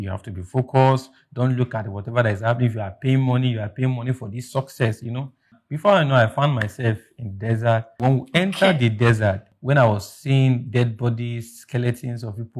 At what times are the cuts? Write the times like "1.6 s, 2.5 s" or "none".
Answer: 5.6 s, 7.9 s, 9.5 s